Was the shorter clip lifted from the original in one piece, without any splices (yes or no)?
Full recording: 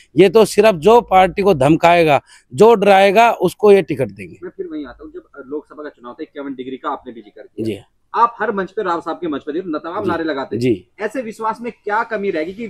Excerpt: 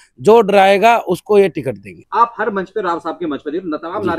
no